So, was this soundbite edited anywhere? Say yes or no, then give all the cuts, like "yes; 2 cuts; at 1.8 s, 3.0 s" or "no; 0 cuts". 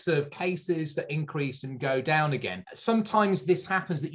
no; 0 cuts